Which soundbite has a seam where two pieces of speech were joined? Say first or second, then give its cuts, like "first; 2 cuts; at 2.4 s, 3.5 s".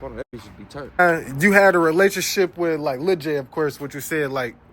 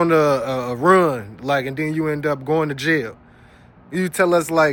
first; 1 cut; at 1.0 s